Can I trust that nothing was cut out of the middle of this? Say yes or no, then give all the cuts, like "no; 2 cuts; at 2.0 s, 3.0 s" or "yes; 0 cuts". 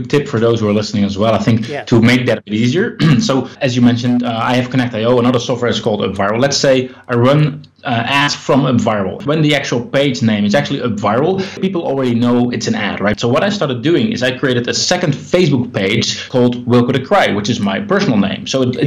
no; 4 cuts; at 9.2 s, 11.6 s, 13.2 s, 16.2 s